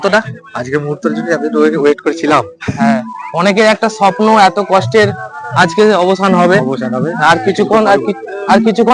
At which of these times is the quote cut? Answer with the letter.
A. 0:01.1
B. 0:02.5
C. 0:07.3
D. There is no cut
D